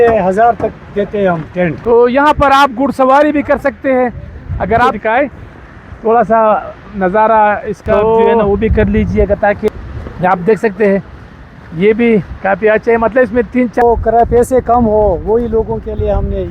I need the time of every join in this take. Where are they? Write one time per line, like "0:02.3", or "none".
0:01.8
0:04.9
0:09.7
0:13.8